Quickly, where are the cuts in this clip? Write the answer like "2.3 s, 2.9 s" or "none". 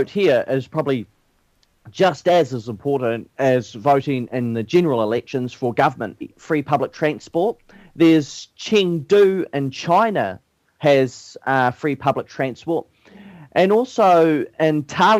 none